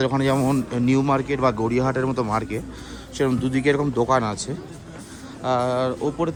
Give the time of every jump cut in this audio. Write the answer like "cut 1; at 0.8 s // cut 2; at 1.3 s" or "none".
none